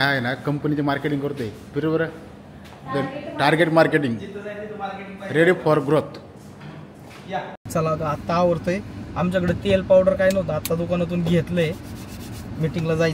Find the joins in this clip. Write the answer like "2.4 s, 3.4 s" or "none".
7.6 s